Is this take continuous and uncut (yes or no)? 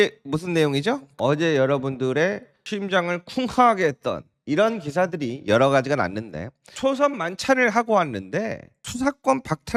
yes